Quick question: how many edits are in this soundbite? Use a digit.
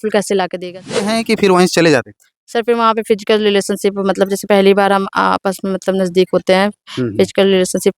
1